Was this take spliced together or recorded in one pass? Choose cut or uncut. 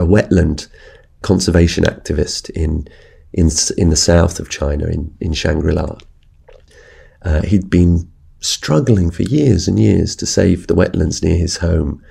cut